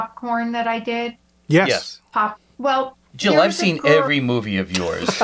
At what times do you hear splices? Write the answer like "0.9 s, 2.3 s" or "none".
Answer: 2.5 s